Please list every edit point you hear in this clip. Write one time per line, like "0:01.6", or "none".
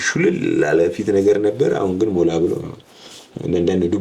none